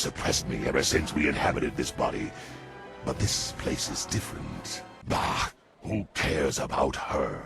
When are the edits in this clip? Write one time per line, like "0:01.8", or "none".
0:04.9